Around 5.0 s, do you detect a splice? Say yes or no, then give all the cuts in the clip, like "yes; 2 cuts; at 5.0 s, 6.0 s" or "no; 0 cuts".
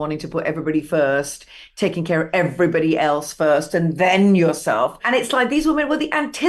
yes; 1 cut; at 5.0 s